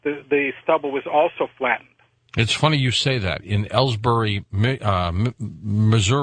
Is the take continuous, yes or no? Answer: no